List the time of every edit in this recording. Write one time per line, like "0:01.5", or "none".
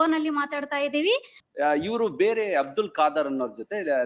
0:01.4